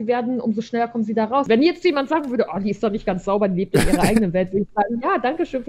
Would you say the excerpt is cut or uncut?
cut